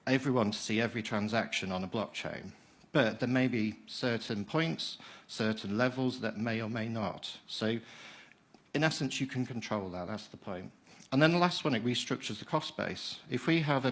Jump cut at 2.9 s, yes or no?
no